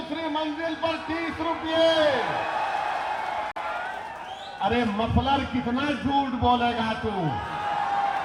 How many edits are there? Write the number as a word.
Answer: zero